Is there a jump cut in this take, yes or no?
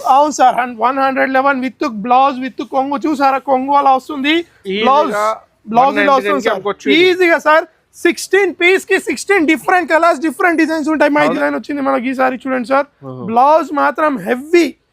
yes